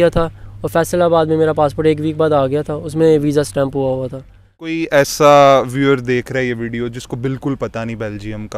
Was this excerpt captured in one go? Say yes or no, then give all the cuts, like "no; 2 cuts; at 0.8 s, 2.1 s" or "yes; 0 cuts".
no; 1 cut; at 4.7 s